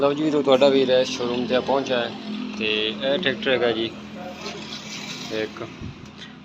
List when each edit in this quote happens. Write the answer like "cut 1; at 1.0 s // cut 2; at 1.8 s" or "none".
none